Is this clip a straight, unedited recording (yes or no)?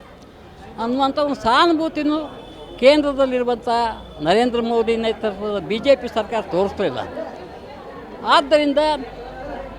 yes